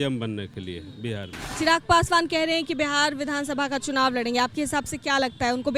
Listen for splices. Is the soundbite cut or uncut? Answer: cut